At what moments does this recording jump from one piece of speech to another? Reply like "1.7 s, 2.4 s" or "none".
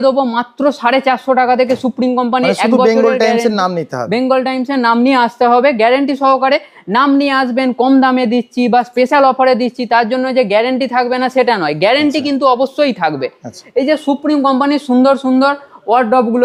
none